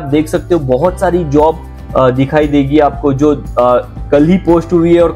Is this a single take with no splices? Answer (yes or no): yes